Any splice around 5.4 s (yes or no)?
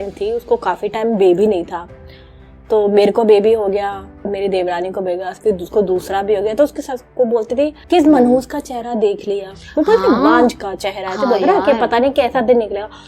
yes